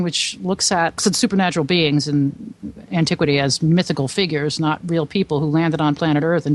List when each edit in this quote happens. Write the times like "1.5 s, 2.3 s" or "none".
1.0 s